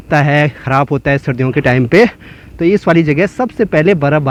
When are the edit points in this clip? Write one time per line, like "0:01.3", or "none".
none